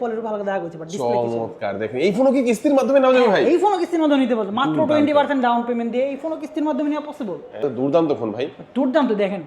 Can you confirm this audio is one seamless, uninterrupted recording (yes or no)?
no